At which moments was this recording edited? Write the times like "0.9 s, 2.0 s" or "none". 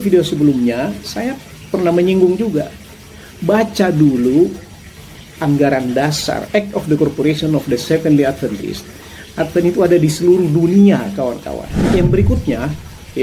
11.9 s

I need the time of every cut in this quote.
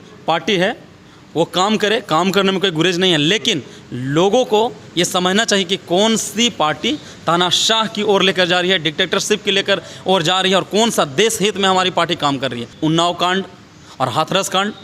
12.7 s

